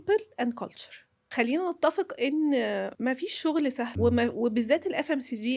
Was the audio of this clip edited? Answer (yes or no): yes